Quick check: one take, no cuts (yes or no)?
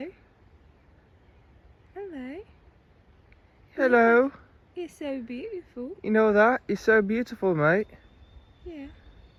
yes